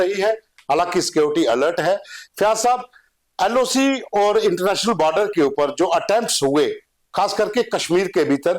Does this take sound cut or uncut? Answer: uncut